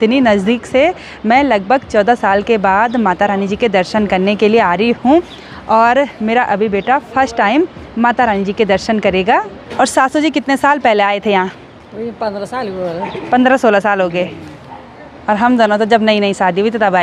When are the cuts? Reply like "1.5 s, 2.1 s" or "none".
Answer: none